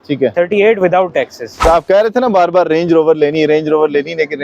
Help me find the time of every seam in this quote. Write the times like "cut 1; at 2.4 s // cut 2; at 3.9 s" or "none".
cut 1; at 1.7 s